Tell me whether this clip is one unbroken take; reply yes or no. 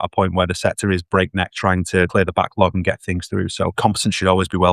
no